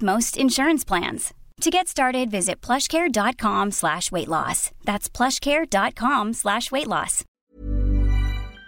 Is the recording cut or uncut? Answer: cut